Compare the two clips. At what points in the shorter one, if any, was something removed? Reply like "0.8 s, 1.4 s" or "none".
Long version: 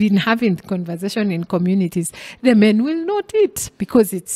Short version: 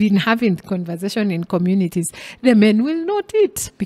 none